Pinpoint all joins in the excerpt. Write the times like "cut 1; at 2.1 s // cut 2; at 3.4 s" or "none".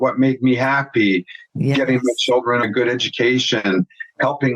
cut 1; at 2.6 s

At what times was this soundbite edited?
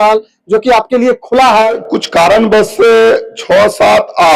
cut 1; at 1.8 s

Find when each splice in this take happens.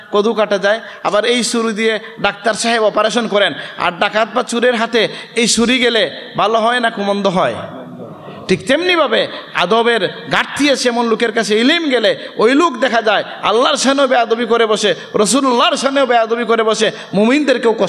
none

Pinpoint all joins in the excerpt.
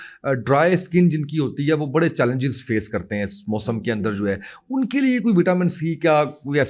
none

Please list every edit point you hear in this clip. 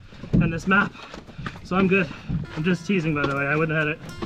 cut 1; at 2.5 s

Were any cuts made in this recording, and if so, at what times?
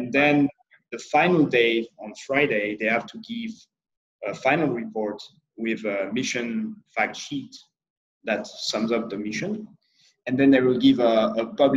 none

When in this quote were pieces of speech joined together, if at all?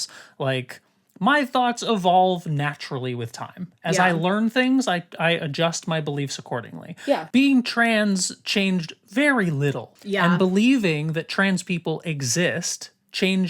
cut 1; at 7.2 s // cut 2; at 9.9 s

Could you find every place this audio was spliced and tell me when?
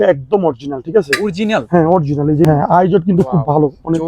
cut 1; at 2.4 s

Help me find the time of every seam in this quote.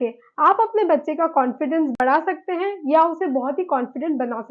none

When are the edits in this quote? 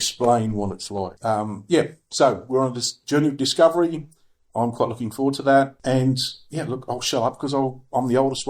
cut 1; at 1.1 s // cut 2; at 5.8 s

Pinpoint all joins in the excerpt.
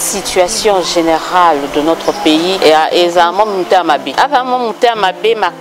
cut 1; at 2.6 s // cut 2; at 4.1 s

